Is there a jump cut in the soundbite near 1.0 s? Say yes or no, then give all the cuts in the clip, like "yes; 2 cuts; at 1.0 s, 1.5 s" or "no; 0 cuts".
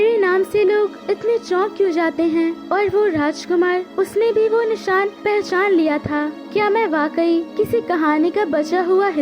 yes; 6 cuts; at 1.0 s, 2.6 s, 3.9 s, 5.2 s, 6.4 s, 7.5 s